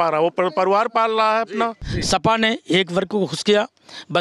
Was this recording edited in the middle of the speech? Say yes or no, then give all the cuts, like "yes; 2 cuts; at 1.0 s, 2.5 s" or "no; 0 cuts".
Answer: yes; 1 cut; at 1.9 s